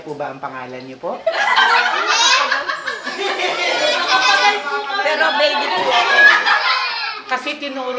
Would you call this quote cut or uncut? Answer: uncut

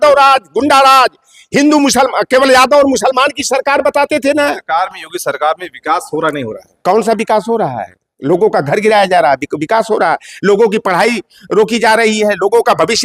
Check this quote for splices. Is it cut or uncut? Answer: cut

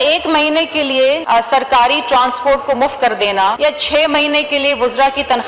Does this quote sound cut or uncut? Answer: cut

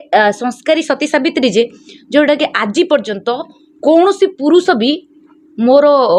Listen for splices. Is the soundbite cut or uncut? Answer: uncut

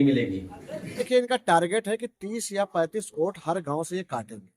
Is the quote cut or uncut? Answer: cut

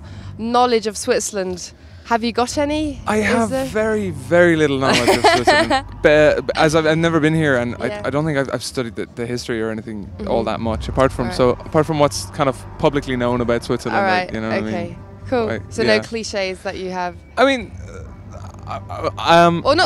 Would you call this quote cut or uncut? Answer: uncut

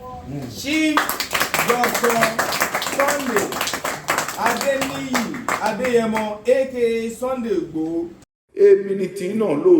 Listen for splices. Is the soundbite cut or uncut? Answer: cut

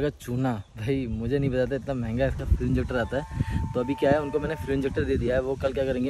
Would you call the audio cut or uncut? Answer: uncut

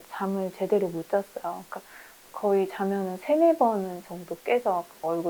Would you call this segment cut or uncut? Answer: uncut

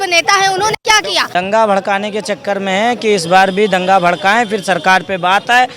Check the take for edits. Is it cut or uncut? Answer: cut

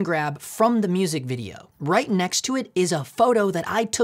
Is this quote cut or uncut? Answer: cut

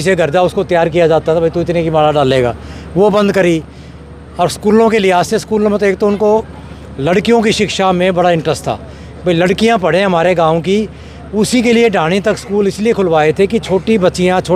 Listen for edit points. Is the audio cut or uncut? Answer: uncut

